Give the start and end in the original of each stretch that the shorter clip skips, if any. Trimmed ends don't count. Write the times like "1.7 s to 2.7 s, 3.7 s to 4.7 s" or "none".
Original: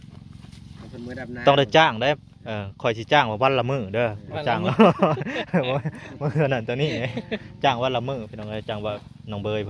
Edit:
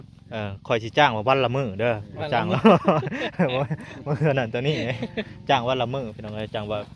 none